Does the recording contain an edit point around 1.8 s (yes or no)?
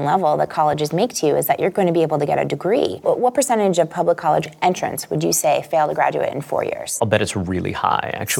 no